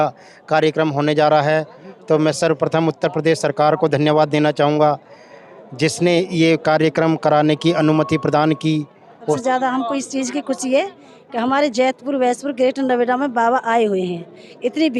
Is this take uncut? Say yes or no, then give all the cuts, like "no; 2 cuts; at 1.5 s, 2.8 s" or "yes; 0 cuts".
no; 1 cut; at 9.4 s